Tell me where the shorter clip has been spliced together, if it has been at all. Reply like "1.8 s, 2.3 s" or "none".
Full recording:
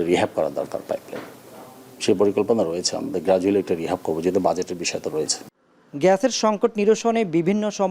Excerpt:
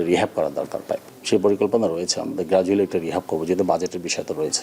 1.1 s